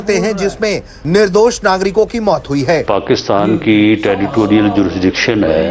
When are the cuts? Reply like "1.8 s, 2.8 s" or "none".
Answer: 2.8 s

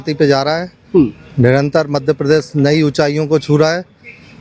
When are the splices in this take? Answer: none

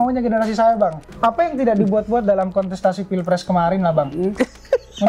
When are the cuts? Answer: 1.0 s

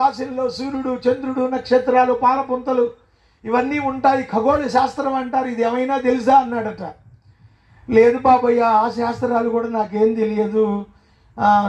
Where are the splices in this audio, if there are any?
none

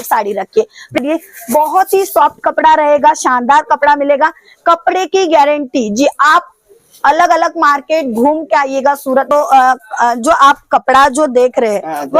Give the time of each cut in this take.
1.0 s, 9.3 s

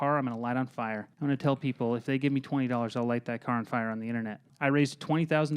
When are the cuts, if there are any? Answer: 1.1 s, 4.5 s

